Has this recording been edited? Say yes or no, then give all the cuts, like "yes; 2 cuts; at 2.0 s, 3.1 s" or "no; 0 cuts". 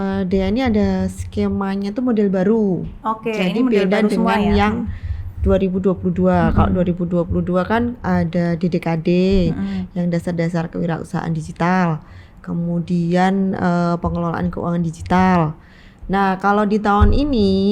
no; 0 cuts